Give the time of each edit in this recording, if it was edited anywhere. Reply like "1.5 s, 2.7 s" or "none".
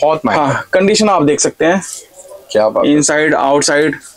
none